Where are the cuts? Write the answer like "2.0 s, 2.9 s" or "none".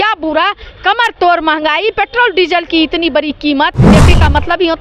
3.9 s